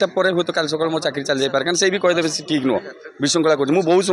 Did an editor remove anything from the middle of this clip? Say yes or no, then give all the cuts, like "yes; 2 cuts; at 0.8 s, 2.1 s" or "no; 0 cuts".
no; 0 cuts